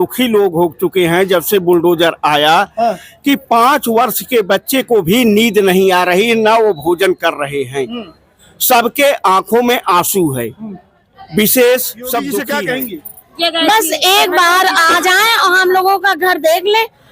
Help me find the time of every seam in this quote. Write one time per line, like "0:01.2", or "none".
0:12.5